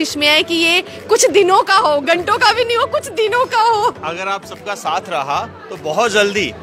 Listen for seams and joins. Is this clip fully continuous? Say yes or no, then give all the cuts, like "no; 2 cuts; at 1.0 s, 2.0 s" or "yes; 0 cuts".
yes; 0 cuts